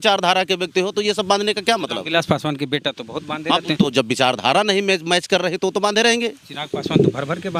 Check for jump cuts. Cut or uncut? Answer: uncut